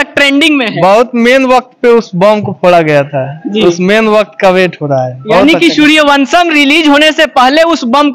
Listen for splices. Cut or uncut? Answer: uncut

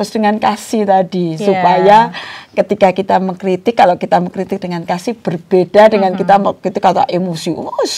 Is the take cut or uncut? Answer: uncut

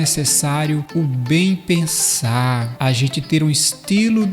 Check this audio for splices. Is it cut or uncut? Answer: cut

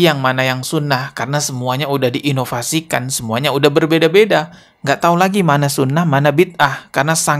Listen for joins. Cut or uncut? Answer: uncut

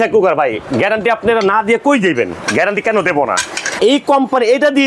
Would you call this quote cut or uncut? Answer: cut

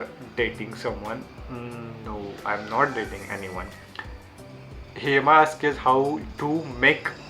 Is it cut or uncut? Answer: uncut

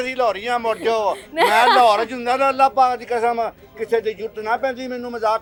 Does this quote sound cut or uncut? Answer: uncut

